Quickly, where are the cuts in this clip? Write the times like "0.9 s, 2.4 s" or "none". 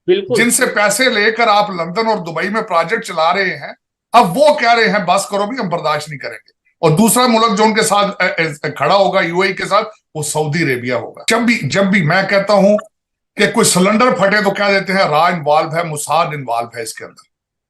11.1 s

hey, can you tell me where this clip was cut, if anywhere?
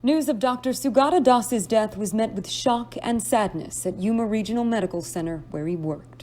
1.6 s

